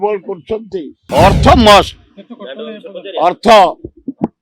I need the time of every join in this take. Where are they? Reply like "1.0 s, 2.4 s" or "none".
1.0 s